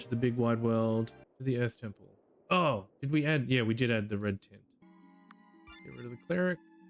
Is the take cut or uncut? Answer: cut